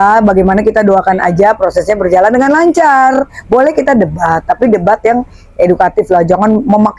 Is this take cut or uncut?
cut